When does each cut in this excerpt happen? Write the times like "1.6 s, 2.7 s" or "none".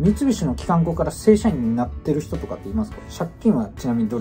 3.0 s